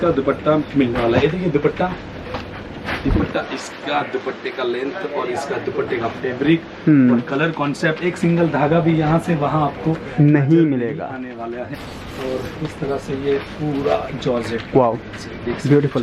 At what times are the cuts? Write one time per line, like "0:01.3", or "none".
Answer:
0:11.7